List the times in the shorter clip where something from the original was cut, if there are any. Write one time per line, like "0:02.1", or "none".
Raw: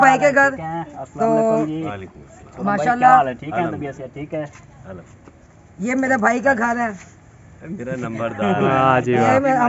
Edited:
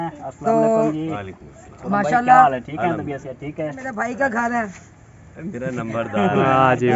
0:03.9